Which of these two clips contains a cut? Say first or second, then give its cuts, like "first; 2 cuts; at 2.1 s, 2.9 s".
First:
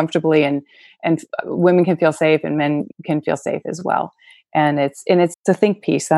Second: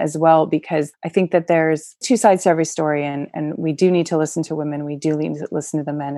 first; 1 cut; at 2.9 s